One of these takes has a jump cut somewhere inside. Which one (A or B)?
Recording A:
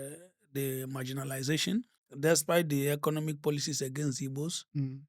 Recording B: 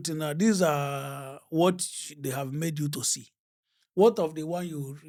A